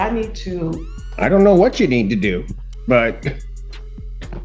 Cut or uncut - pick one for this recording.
uncut